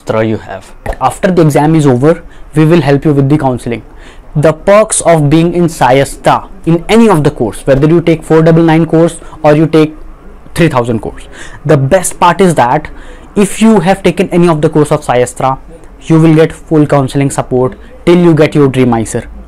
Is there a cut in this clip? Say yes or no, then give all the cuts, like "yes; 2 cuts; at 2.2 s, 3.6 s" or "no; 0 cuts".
yes; 1 cut; at 0.9 s